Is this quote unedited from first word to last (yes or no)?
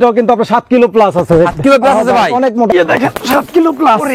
no